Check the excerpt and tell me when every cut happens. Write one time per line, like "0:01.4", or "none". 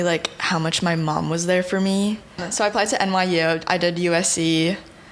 0:02.4